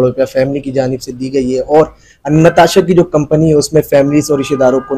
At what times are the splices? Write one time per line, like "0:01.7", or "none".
none